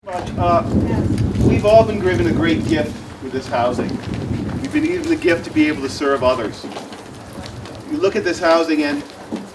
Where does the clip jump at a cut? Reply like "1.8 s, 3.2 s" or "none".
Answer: none